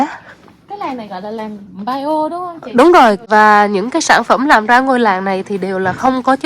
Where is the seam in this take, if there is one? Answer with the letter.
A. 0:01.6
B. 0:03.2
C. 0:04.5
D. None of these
B